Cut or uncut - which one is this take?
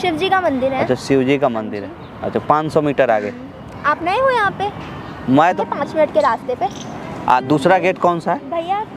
cut